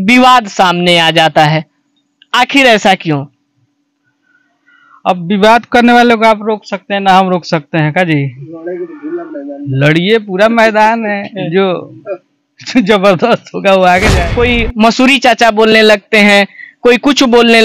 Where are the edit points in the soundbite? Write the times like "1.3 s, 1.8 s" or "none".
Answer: 14.2 s